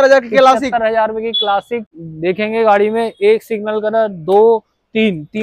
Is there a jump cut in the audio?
yes; 1 cut; at 1.8 s

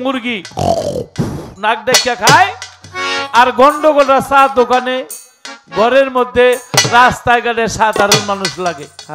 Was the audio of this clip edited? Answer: no; 0 cuts

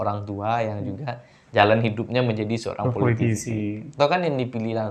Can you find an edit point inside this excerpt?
no; 0 cuts

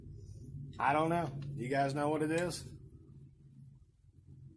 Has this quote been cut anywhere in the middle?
no; 0 cuts

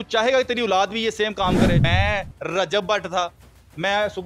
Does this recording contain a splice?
yes; 1 cut; at 1.8 s

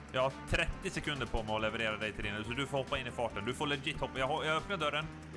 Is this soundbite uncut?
yes; 0 cuts

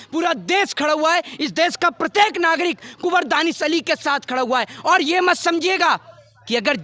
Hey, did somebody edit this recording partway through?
no; 0 cuts

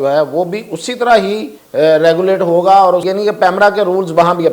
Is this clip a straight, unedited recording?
no; 2 cuts; at 1.5 s, 3.1 s

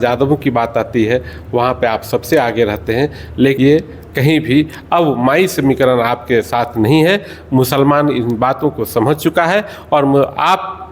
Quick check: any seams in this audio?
yes; 1 cut; at 3.6 s

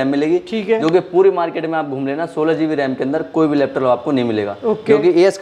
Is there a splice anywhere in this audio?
no; 0 cuts

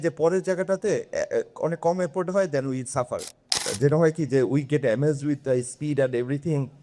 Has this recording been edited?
yes; 1 cut; at 3.6 s

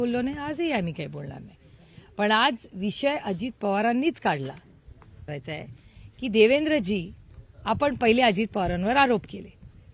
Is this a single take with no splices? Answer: no; 1 cut; at 5.3 s

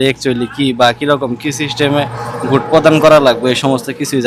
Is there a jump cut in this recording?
no; 0 cuts

